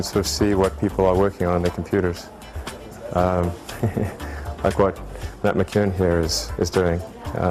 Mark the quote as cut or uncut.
uncut